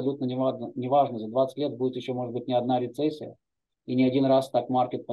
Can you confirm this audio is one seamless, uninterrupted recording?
yes; 0 cuts

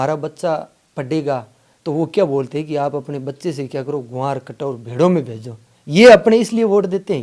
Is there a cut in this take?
no; 0 cuts

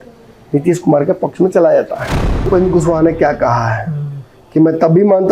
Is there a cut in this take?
yes; 1 cut; at 2.5 s

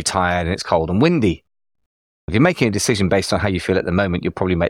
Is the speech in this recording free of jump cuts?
yes; 0 cuts

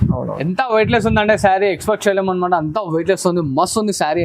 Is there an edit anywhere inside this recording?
no; 0 cuts

